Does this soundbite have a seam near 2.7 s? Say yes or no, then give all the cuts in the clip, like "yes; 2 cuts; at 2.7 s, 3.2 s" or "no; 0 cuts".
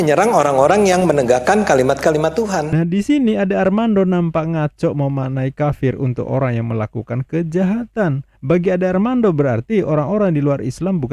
yes; 1 cut; at 2.7 s